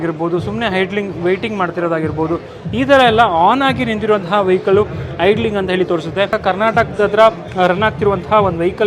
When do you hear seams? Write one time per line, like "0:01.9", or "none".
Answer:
0:06.4